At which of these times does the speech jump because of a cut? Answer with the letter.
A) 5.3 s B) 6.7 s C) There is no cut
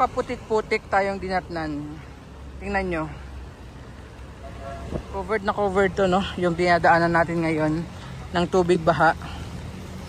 A